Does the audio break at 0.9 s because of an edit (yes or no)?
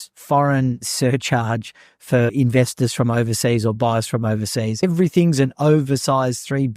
yes